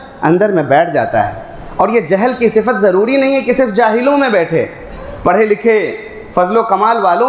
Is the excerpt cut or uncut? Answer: uncut